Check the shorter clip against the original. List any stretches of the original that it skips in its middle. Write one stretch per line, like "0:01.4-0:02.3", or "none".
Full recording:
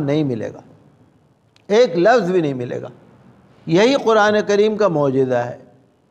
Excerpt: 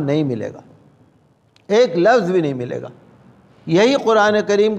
none